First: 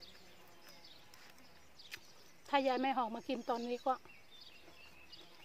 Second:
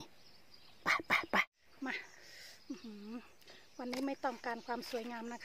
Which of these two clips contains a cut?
second; 1 cut; at 1.5 s

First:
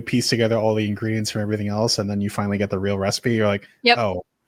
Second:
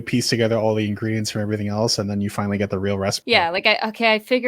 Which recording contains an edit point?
second; 1 cut; at 3.2 s

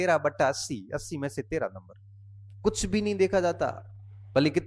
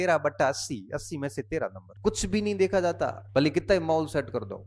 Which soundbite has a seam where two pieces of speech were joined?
second; 2 cuts; at 1.9 s, 3.2 s

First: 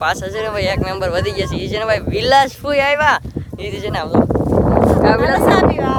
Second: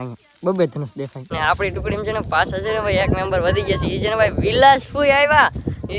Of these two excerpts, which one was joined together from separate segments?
second; 1 cut; at 1.3 s

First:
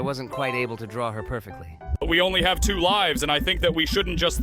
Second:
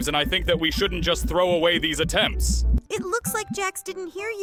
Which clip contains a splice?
first; 1 cut; at 2.0 s

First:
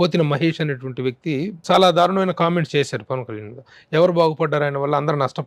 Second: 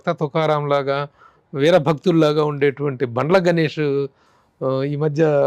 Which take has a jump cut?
first; 1 cut; at 1.6 s

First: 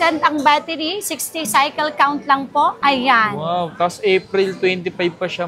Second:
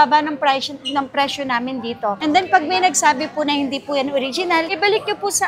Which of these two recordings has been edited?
second; 1 cut; at 2.2 s

